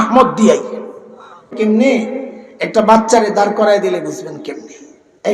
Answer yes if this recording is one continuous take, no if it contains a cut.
no